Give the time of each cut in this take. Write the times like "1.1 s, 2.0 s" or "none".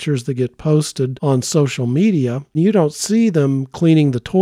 1.2 s, 2.5 s

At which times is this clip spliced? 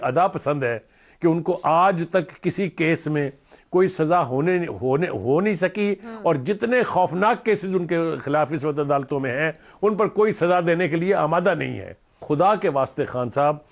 12.2 s

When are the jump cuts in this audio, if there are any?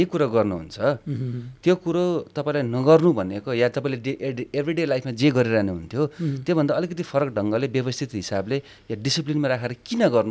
none

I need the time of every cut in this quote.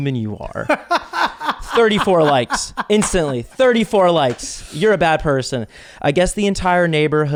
none

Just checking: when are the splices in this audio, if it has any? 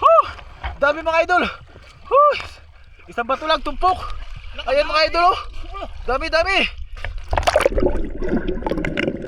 none

